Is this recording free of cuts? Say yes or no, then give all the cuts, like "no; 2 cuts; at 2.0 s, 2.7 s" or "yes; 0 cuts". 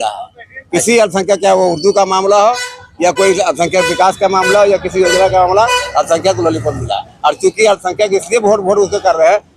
yes; 0 cuts